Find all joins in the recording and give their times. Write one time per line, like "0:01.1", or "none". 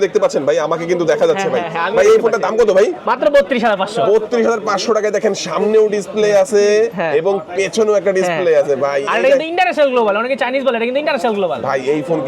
none